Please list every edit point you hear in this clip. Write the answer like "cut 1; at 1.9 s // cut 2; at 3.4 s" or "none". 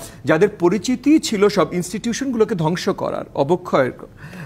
none